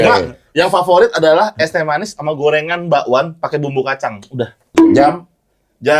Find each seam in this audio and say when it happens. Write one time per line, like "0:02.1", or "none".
0:04.7